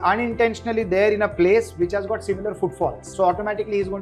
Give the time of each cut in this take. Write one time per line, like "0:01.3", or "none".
0:03.0